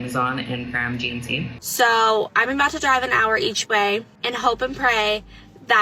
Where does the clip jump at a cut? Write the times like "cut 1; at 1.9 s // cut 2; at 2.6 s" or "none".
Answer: cut 1; at 1.6 s // cut 2; at 4.2 s